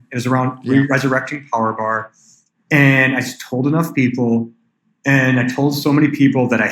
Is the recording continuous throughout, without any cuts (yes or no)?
yes